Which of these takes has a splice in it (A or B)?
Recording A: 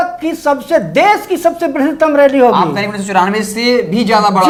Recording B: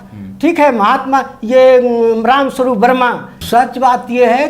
B